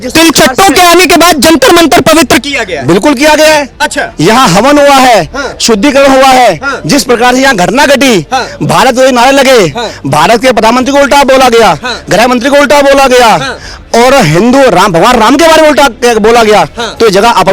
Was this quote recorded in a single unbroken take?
yes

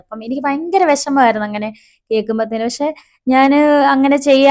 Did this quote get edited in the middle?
no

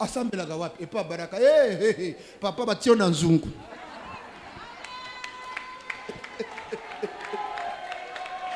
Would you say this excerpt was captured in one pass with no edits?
yes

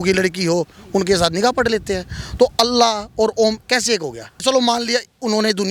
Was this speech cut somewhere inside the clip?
yes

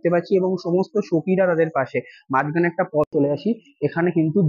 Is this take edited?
yes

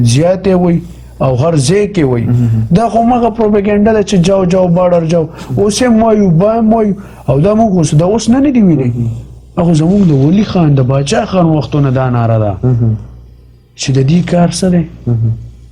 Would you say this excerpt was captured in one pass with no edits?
yes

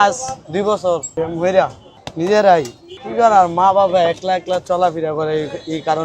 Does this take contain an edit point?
yes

